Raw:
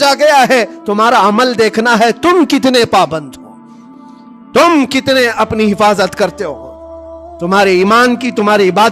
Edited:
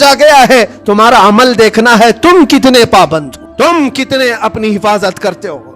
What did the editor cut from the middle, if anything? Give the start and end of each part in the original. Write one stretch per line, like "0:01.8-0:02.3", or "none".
0:03.4-0:04.3